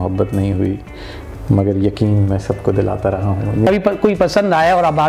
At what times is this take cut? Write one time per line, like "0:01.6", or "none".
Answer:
0:03.7